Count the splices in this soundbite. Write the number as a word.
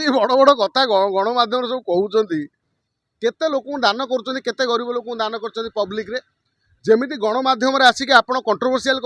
zero